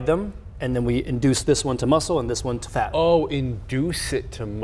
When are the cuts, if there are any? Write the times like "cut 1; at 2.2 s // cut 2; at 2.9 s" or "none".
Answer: none